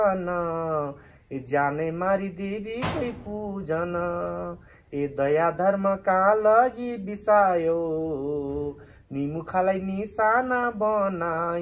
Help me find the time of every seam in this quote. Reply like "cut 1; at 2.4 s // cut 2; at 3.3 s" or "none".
none